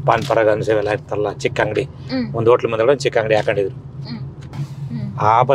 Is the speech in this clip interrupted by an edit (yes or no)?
yes